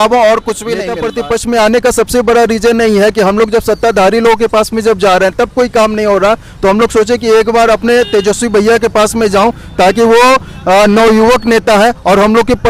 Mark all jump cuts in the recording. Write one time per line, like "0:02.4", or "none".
0:01.0